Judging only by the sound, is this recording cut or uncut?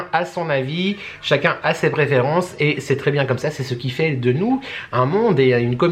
uncut